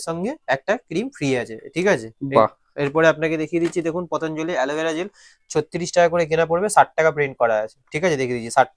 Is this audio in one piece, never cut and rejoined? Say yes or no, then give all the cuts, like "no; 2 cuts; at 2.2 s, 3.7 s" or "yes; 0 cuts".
yes; 0 cuts